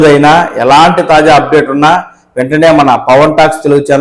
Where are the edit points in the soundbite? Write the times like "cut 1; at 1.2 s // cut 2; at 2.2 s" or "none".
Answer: none